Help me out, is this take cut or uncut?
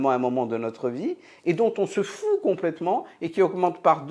uncut